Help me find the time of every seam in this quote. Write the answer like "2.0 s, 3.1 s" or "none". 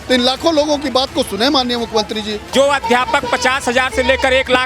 2.5 s